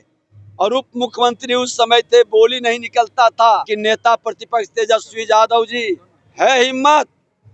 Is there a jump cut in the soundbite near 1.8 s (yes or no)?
no